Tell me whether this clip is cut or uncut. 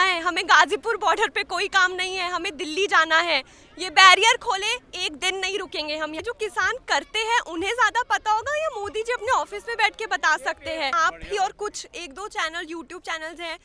cut